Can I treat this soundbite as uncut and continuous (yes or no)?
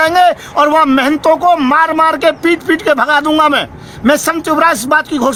yes